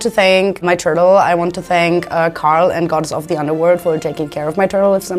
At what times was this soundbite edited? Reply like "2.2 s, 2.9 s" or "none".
none